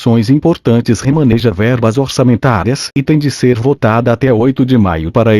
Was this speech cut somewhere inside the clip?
yes; 1 cut; at 0.9 s

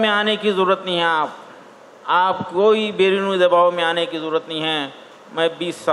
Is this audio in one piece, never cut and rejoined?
yes; 0 cuts

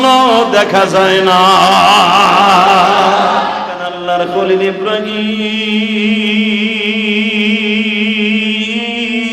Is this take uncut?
no; 1 cut; at 3.9 s

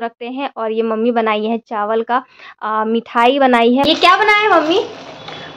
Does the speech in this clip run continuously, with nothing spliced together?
no; 1 cut; at 3.8 s

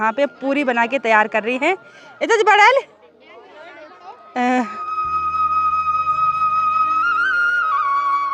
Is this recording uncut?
yes; 0 cuts

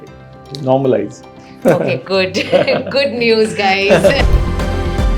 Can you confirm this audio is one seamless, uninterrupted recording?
no; 1 cut; at 4.2 s

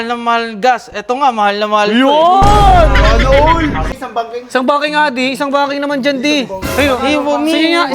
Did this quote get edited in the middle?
yes; 1 cut; at 3.9 s

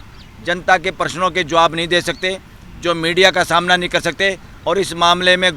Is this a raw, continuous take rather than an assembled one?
no; 1 cut; at 4.5 s

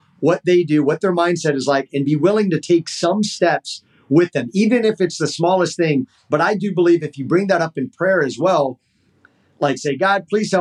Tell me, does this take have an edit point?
no; 0 cuts

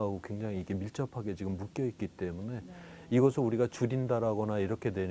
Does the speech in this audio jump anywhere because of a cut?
no; 0 cuts

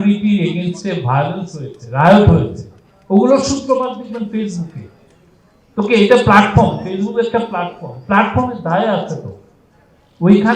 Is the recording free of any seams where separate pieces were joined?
yes; 0 cuts

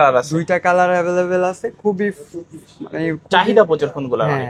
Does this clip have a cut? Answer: no; 0 cuts

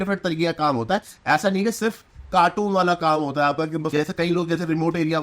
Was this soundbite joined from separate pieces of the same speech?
yes; 1 cut; at 3.9 s

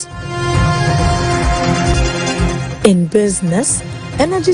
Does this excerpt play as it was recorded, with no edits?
yes; 0 cuts

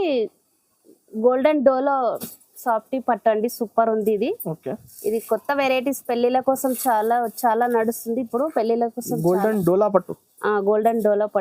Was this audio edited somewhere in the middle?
no; 0 cuts

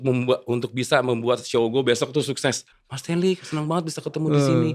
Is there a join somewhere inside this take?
yes; 1 cut; at 2.8 s

